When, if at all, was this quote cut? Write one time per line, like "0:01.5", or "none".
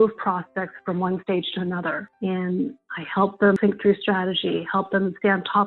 0:02.1
0:03.6